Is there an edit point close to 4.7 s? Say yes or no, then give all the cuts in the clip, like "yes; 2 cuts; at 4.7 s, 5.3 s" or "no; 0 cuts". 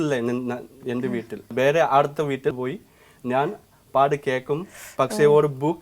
no; 2 cuts; at 1.5 s, 2.5 s